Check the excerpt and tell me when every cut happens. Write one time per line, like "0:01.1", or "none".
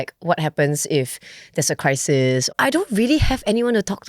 0:02.5